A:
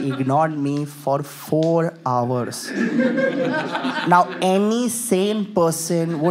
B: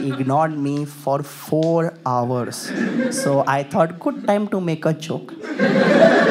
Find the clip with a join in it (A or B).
B